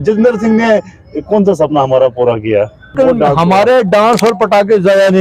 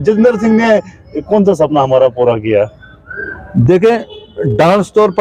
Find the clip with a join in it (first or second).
first